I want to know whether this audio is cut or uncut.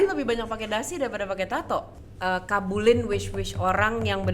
cut